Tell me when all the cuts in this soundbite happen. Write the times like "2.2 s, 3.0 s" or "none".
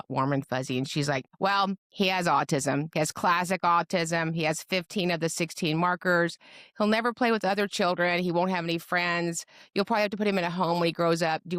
1.3 s